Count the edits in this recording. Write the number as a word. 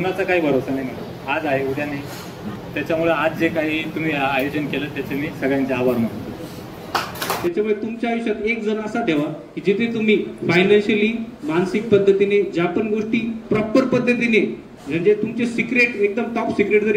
two